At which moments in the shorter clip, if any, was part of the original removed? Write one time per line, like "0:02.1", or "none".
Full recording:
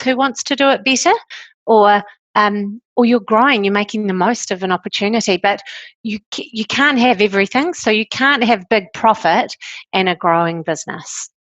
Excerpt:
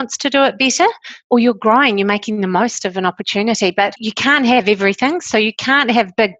0:01.1
0:04.0